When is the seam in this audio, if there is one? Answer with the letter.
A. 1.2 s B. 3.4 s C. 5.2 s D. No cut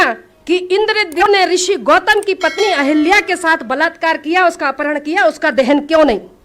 A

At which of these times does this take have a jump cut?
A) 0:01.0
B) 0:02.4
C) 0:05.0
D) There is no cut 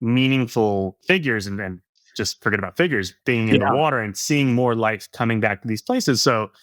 A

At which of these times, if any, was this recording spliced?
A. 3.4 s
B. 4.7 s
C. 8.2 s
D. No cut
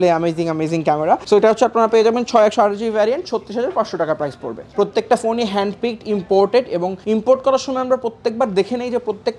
B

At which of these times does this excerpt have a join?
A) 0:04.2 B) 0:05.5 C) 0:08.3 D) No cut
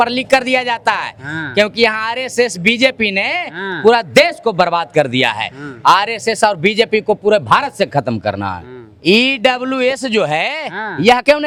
D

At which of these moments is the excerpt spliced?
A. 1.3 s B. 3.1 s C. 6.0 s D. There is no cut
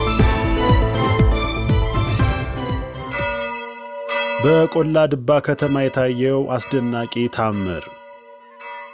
B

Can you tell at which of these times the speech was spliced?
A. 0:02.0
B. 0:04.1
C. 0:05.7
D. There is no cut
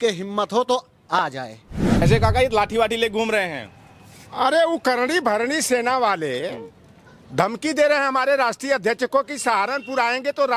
A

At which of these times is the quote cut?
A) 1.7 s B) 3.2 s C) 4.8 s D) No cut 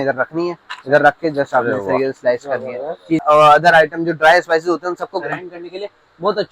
B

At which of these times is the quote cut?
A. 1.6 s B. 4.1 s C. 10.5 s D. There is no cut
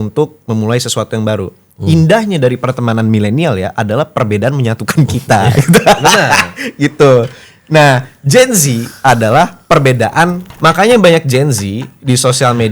C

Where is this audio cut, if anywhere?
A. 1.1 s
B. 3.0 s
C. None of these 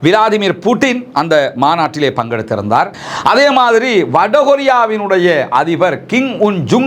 B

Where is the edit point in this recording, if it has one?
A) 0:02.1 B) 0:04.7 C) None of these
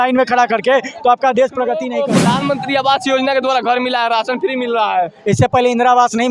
A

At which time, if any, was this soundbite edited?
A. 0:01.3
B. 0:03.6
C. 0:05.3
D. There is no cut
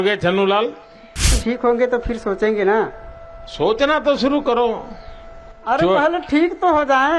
A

